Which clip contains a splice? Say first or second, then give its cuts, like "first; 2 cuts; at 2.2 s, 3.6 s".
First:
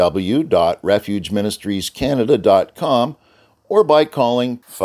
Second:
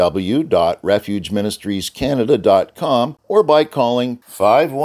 second; 1 cut; at 3.2 s